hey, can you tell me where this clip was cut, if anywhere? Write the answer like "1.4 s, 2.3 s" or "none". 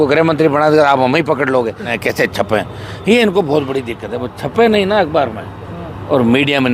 1.9 s